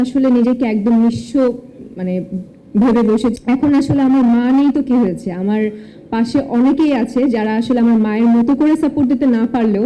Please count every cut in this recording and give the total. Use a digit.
1